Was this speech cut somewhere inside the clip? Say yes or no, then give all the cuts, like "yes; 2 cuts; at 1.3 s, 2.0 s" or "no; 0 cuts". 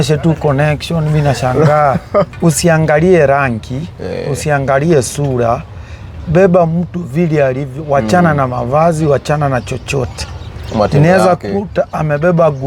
yes; 1 cut; at 2.3 s